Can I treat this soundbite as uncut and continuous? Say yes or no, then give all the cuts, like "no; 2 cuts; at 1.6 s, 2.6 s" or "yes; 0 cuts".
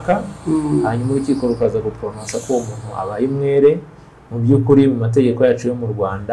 yes; 0 cuts